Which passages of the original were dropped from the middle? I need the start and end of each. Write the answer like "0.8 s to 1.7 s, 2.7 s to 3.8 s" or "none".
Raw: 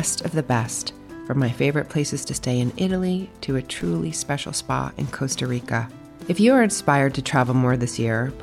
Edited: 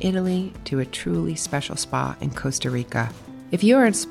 none

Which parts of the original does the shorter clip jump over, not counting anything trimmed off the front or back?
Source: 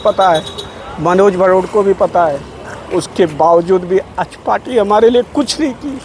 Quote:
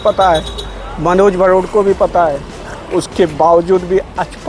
none

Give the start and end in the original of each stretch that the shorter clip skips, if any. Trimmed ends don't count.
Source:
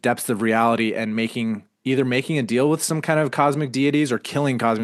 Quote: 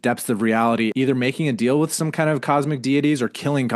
0.9 s to 1.8 s

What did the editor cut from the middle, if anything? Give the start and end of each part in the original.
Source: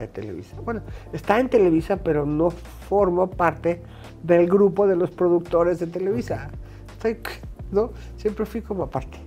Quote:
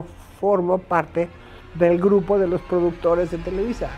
none

